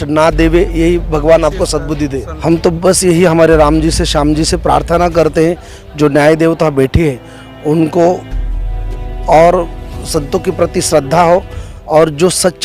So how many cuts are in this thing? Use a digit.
1